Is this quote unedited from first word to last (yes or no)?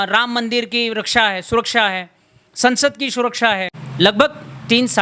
no